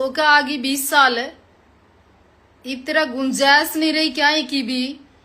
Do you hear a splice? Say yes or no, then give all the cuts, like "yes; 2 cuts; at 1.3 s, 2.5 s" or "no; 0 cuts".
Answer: no; 0 cuts